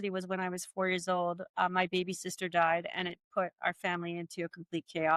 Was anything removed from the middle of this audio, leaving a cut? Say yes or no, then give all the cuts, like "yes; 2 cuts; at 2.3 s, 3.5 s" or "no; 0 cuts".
no; 0 cuts